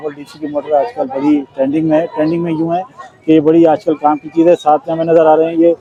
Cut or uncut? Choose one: uncut